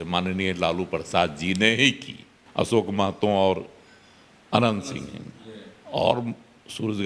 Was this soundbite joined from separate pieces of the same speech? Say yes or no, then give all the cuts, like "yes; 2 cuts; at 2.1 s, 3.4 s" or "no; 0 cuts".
yes; 1 cut; at 2.5 s